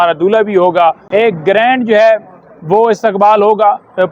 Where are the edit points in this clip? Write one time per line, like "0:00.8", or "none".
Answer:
0:01.0